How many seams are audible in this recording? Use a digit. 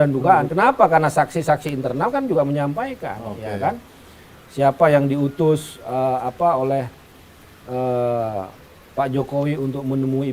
0